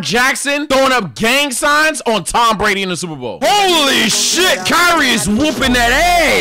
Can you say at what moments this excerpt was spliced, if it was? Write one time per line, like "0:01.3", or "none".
0:03.3